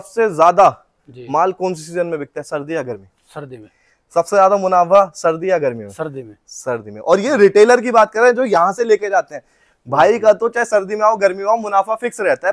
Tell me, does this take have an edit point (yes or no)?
no